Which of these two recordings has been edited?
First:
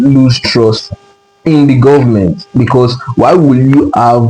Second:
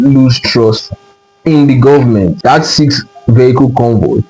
second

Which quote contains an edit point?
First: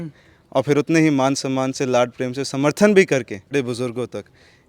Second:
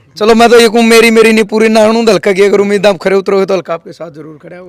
first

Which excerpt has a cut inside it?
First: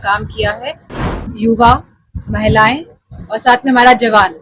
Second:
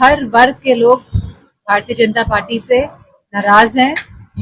first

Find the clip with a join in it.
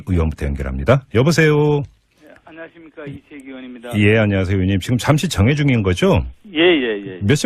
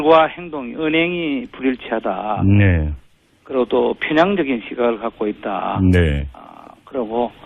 second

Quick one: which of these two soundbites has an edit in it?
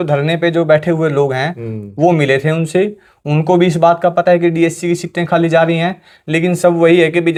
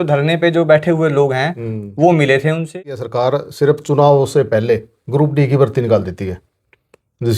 second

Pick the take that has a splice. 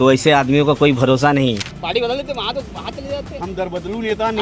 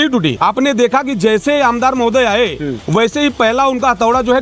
first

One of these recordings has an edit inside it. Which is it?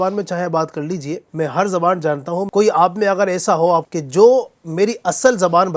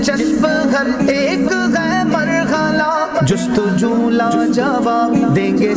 first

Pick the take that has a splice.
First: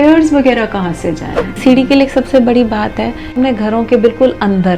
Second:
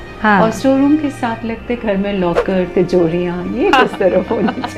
first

